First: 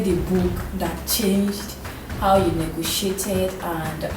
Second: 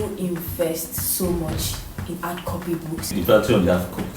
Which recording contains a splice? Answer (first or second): second